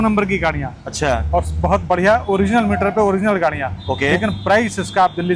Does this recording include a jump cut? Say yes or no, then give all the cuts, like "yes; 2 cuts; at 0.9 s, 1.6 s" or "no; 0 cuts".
no; 0 cuts